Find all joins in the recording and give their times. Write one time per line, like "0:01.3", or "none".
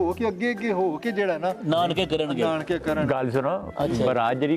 none